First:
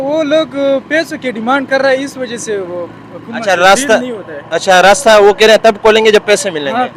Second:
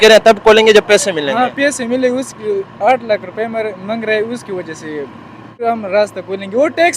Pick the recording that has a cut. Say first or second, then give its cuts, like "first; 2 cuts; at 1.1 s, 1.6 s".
second; 1 cut; at 5.6 s